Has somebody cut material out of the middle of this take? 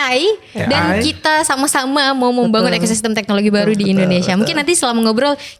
no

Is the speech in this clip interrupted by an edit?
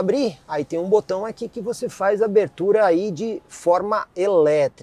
no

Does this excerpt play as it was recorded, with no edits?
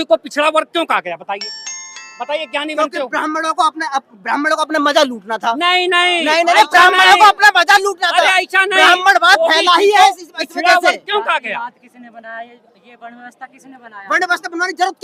yes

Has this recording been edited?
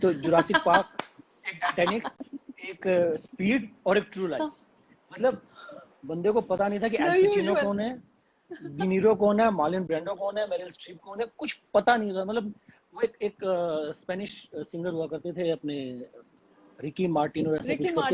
no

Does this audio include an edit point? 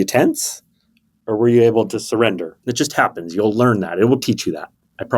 yes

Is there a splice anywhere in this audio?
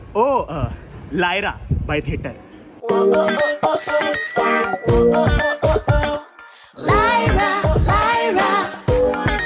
no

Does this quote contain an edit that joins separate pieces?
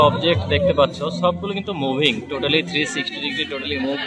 no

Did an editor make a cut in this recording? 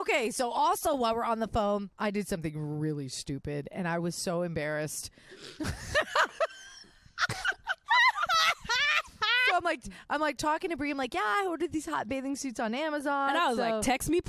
no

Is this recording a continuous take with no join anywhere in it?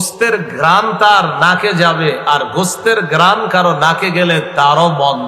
yes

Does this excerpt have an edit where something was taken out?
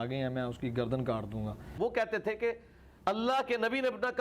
yes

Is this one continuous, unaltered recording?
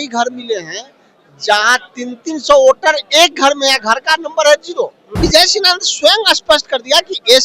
no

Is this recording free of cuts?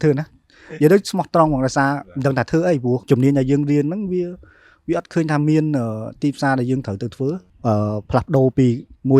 no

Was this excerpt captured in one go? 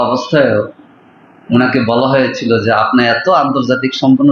yes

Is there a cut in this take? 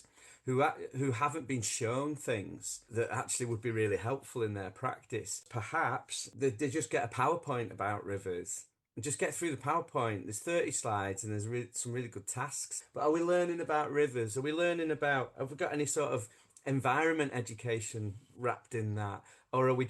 yes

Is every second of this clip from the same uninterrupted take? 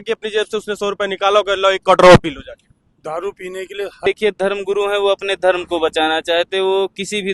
no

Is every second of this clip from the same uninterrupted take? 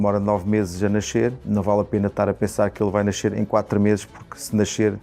no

